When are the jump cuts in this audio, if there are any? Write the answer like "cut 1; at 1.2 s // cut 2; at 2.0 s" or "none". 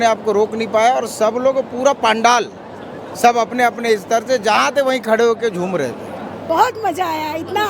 cut 1; at 6.3 s